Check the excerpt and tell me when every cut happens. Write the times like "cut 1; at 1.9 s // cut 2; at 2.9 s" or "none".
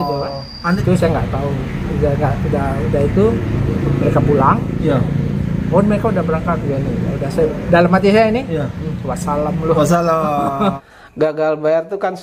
cut 1; at 10.8 s